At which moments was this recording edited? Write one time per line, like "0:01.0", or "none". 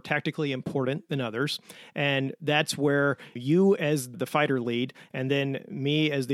0:03.3
0:04.1